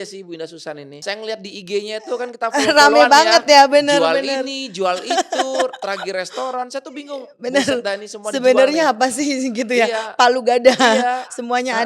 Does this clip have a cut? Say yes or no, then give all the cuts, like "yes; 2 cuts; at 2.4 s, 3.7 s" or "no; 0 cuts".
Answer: yes; 1 cut; at 1.0 s